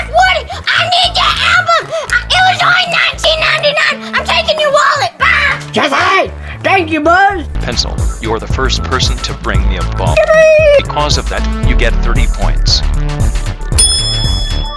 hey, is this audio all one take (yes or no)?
yes